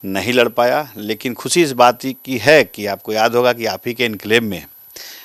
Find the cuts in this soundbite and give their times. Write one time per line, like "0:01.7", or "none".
none